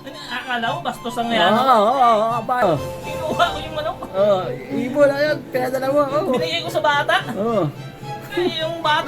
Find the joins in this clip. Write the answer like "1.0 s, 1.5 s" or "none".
2.6 s